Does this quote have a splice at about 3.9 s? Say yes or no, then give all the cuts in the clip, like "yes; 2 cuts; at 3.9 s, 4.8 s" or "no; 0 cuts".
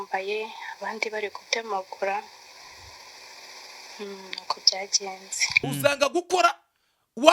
no; 1 cut; at 5.5 s